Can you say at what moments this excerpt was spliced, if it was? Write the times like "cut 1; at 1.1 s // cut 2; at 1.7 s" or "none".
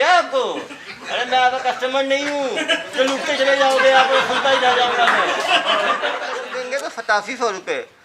cut 1; at 6.5 s